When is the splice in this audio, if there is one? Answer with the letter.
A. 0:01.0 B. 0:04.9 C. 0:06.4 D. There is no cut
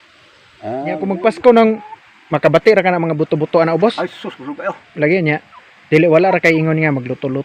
A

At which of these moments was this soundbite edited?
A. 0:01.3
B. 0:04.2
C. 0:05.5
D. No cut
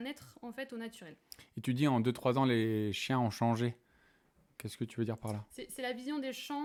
D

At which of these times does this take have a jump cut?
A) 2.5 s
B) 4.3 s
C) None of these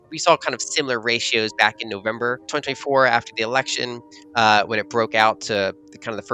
A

